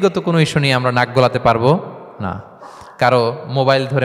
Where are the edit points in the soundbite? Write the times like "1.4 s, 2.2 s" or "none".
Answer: none